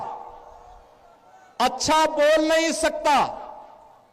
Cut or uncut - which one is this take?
uncut